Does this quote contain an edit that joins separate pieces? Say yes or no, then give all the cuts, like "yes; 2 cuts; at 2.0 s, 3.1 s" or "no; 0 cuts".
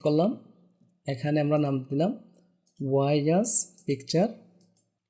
no; 0 cuts